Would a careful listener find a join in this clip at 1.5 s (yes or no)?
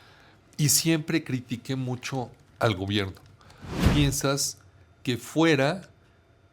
no